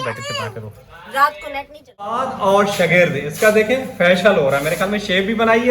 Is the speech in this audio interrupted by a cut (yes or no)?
yes